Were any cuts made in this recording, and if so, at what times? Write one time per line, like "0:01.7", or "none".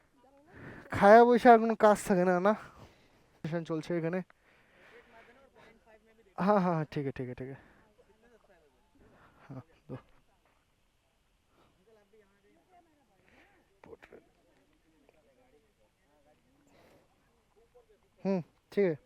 0:03.4
0:08.9